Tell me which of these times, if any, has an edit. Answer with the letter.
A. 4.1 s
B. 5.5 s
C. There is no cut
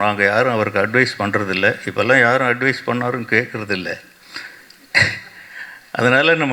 C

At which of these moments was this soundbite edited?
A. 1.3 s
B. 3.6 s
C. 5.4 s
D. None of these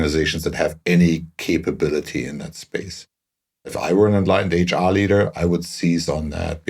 B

